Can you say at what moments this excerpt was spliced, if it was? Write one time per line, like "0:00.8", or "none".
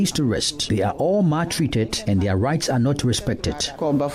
none